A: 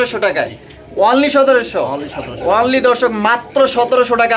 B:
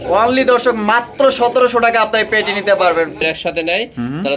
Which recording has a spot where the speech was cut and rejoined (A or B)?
B